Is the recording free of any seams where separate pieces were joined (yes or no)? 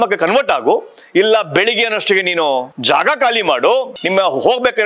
no